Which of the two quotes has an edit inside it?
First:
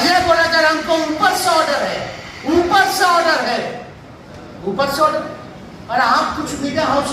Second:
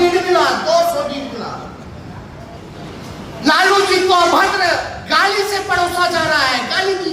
second; 1 cut; at 2.6 s

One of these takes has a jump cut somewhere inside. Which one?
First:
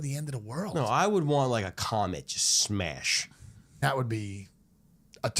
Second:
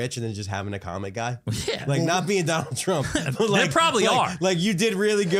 first; 1 cut; at 3.8 s

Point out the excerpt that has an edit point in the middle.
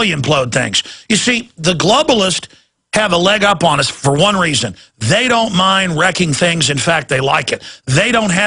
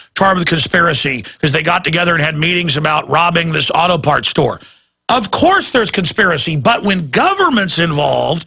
first; 1 cut; at 1.2 s

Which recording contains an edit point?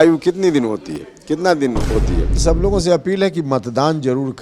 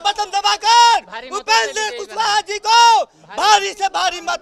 first; 1 cut; at 2.4 s

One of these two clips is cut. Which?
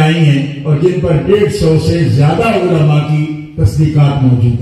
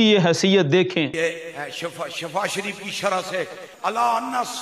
second; 2 cuts; at 1.1 s, 3.6 s

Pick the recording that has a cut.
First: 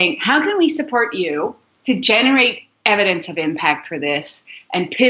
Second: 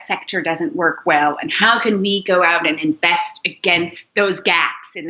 second; 1 cut; at 4.0 s

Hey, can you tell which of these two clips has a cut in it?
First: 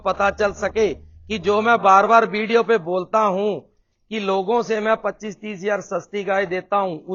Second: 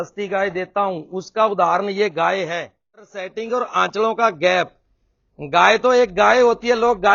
second; 1 cut; at 3.2 s

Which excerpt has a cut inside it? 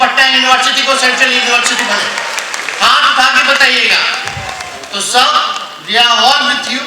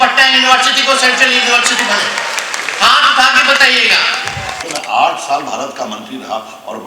second; 1 cut; at 4.6 s

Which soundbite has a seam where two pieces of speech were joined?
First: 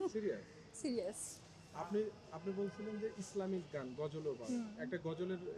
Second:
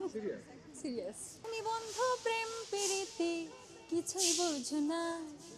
second; 1 cut; at 1.5 s

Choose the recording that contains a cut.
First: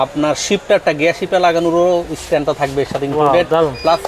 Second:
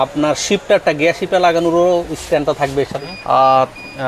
second; 1 cut; at 3.0 s

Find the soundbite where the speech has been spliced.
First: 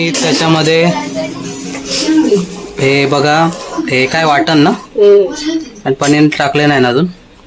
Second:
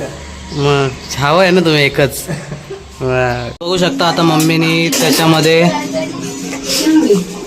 second; 2 cuts; at 2.3 s, 3.5 s

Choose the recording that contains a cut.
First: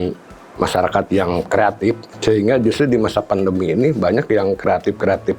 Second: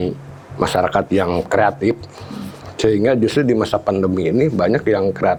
first; 1 cut; at 2.1 s

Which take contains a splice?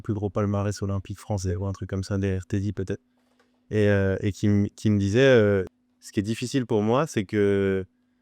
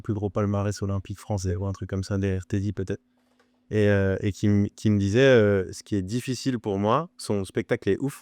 first; 1 cut; at 5.8 s

